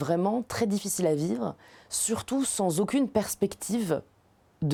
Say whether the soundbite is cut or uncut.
uncut